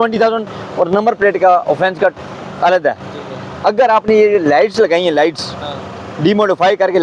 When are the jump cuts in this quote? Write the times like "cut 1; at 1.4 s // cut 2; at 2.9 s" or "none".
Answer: none